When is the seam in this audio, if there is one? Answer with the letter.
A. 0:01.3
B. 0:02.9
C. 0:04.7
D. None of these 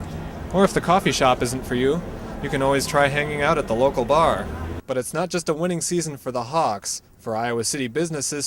C